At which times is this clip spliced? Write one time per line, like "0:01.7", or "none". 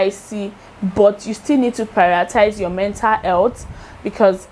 none